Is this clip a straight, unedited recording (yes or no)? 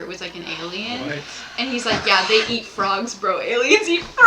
yes